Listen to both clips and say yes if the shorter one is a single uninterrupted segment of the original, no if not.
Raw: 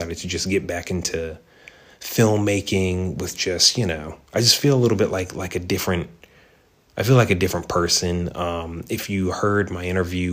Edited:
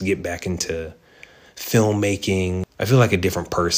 no